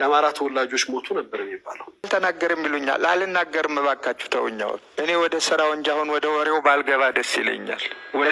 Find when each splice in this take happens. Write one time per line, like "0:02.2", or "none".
0:02.1